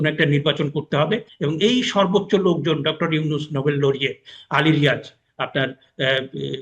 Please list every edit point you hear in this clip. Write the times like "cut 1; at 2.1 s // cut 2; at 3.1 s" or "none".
cut 1; at 1.3 s